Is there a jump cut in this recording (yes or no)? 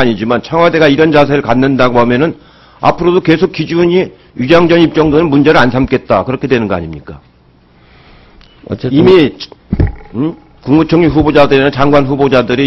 yes